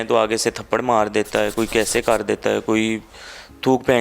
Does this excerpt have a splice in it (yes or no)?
no